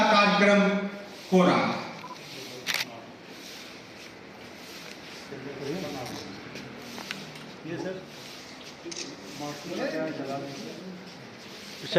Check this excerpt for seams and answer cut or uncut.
uncut